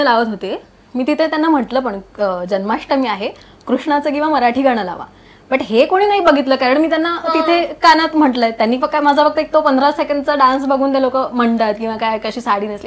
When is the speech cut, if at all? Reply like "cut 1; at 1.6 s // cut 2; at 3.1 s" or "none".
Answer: none